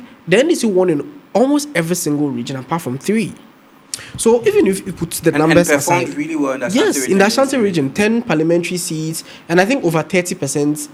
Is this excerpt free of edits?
yes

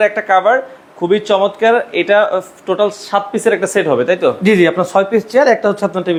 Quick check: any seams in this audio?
no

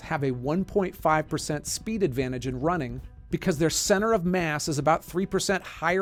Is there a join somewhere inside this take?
no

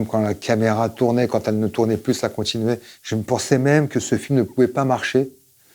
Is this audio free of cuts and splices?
no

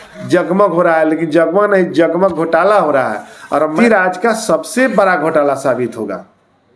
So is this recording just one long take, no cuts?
no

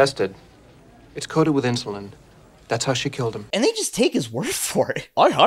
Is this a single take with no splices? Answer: no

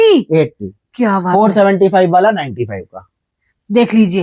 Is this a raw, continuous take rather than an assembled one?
yes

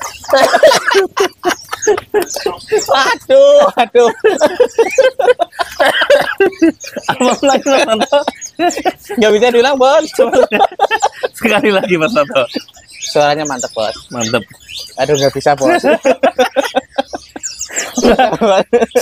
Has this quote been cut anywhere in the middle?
no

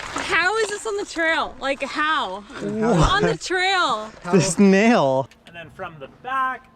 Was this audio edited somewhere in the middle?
yes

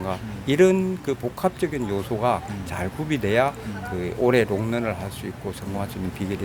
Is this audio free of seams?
yes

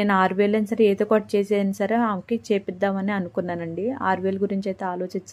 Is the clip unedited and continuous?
yes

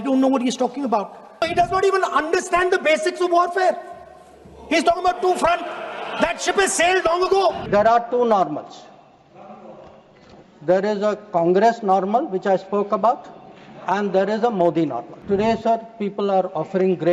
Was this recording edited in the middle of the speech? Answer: yes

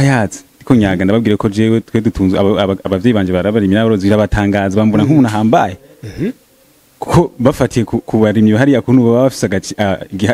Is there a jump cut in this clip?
no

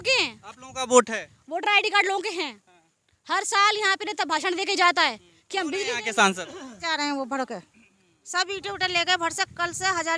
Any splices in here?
yes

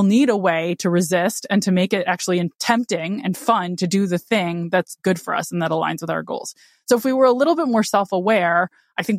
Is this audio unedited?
yes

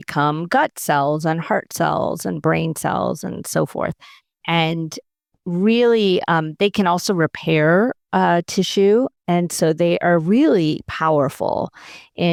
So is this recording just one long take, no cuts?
yes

